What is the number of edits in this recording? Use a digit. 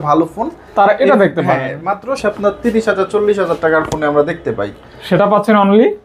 1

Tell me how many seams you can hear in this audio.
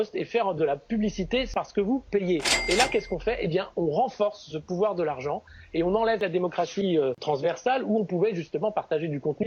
4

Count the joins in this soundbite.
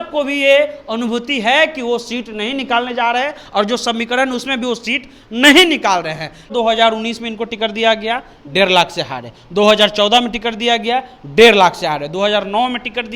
1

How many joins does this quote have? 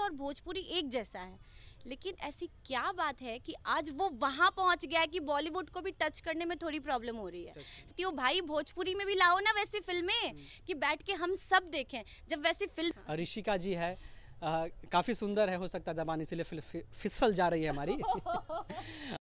2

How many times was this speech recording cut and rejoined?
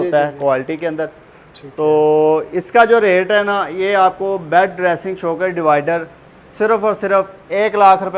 0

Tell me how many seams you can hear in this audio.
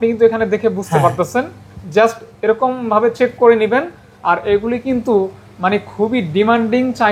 0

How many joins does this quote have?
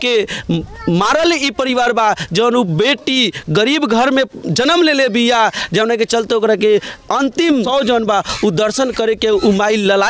1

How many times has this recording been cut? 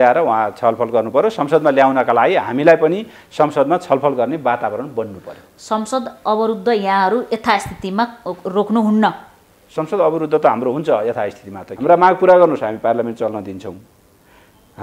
1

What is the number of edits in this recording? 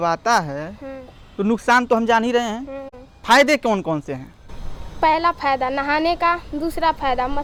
0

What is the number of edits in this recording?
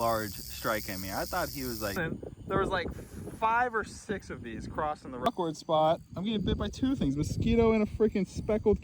2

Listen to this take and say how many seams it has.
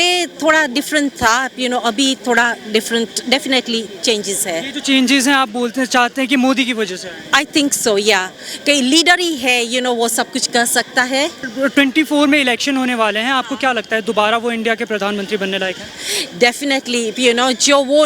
1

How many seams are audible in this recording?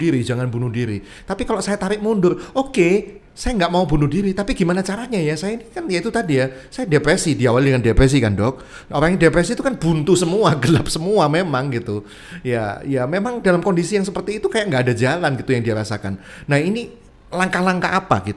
0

